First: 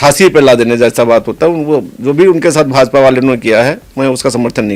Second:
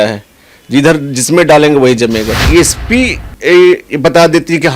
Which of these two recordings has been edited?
second; 1 cut; at 2.4 s

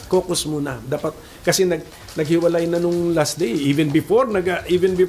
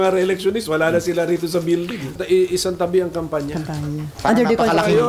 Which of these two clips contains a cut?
second; 2 cuts; at 2.2 s, 4.1 s

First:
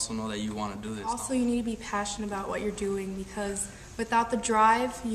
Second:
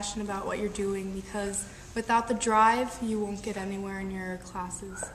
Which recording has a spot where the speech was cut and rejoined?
first; 1 cut; at 1.1 s

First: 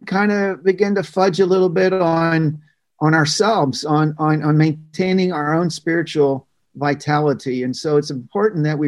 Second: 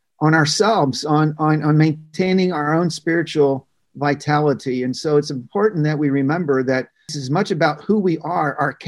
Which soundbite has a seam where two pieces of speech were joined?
second; 1 cut; at 7.2 s

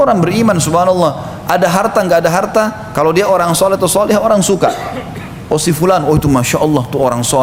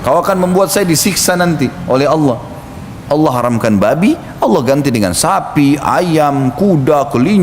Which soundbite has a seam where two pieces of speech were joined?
second; 1 cut; at 3.3 s

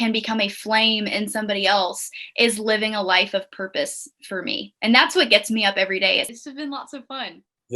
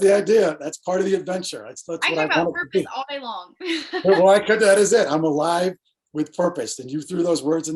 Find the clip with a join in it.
first; 1 cut; at 6.3 s

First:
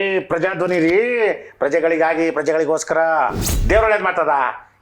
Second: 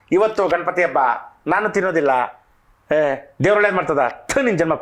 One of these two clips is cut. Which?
first; 1 cut; at 3.5 s

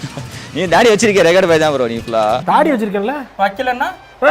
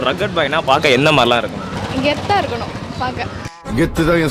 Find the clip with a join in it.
first; 1 cut; at 2.4 s

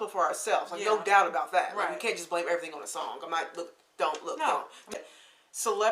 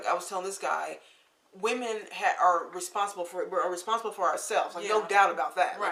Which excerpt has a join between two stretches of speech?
first; 1 cut; at 4.9 s

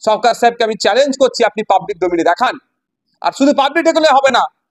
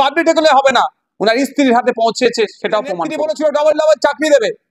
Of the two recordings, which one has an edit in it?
second; 1 cut; at 3.1 s

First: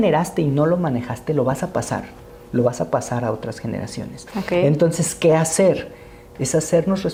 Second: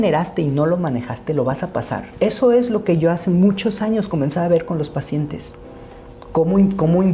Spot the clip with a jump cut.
second; 1 cut; at 2.1 s

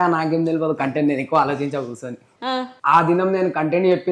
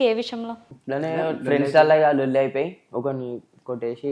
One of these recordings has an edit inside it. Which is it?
first; 1 cut; at 2.7 s

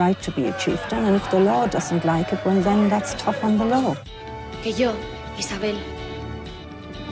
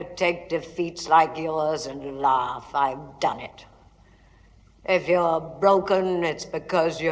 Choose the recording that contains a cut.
first; 1 cut; at 4.1 s

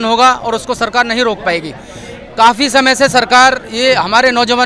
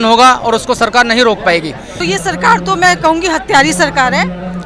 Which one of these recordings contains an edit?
second; 1 cut; at 1.9 s

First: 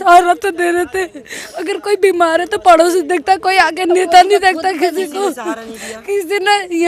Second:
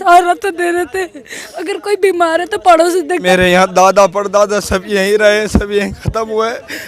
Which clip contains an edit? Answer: second; 1 cut; at 3.2 s

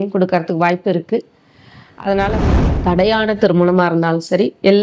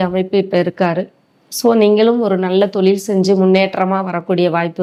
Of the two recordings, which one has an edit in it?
first; 1 cut; at 2.6 s

